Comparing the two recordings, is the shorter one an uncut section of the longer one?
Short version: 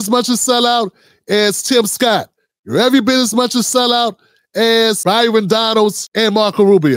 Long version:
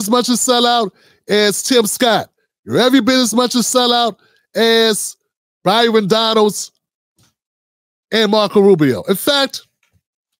no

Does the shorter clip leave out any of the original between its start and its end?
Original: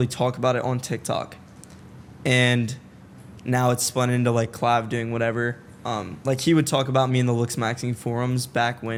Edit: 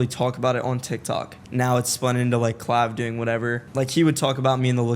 yes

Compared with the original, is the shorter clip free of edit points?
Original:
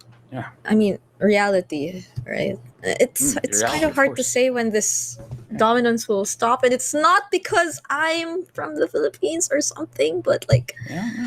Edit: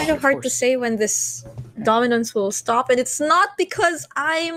yes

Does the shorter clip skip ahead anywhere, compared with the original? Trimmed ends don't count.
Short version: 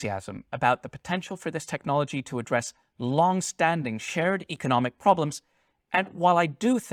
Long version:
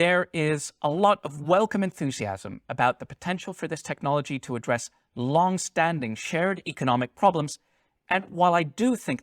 no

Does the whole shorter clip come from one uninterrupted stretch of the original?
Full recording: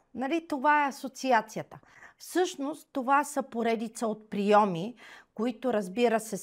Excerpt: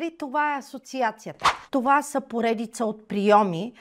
no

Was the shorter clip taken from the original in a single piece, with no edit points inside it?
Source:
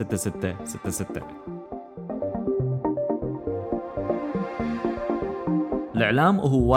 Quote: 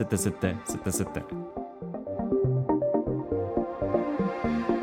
no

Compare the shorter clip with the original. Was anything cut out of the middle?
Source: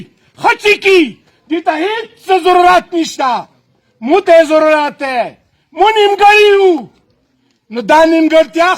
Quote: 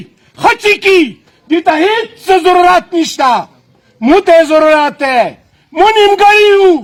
no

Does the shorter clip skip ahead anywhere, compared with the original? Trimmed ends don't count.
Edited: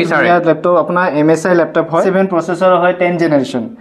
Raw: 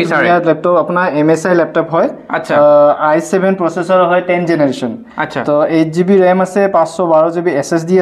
yes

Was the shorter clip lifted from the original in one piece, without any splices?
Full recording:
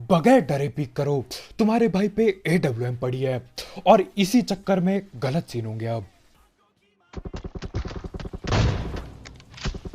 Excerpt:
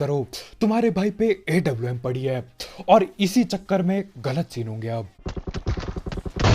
no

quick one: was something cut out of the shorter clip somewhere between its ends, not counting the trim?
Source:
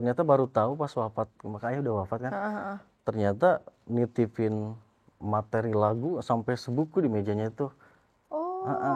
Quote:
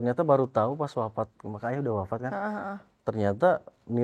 no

